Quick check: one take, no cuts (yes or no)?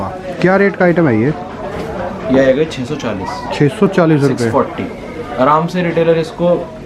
yes